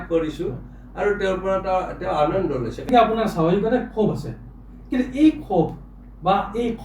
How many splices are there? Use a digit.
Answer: 1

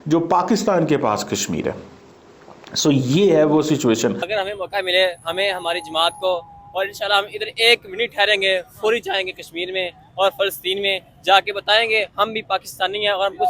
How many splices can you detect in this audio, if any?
1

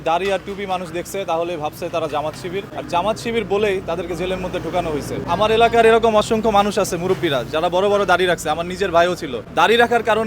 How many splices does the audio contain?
3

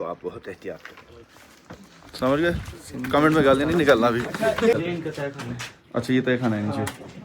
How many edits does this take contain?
1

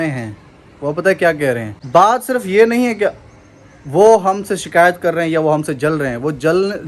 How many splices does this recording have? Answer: 1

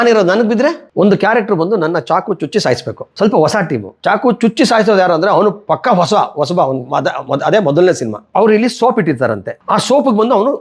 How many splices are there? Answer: 5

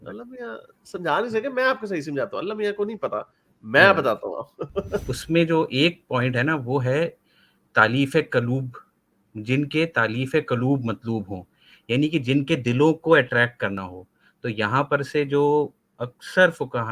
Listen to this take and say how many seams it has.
1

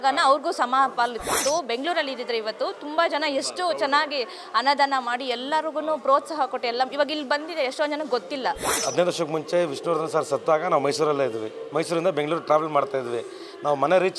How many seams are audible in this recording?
2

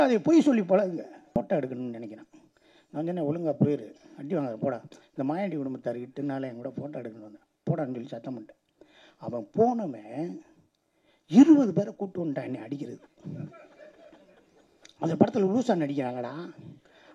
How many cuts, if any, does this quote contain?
1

